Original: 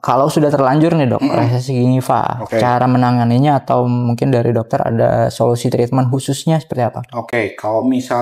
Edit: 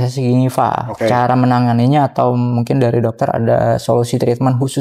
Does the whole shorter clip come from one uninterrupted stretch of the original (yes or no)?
yes